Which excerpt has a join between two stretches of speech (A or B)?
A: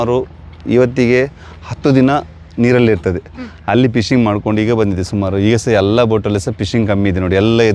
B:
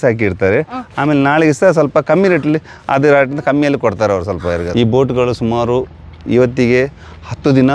B